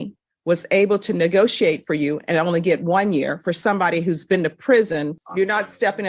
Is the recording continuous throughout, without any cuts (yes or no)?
no